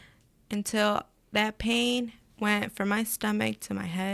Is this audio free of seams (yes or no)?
yes